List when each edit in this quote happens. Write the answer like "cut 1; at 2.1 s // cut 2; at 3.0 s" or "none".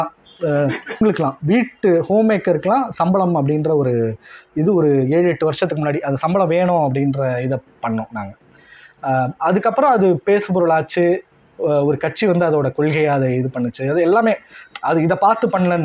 cut 1; at 1.0 s